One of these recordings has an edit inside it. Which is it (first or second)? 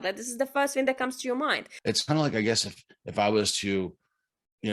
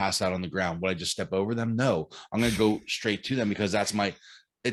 first